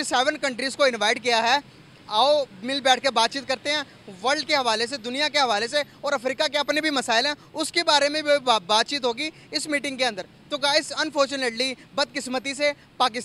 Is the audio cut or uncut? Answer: uncut